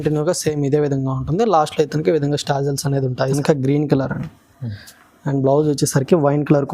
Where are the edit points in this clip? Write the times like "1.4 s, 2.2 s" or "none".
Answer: 3.4 s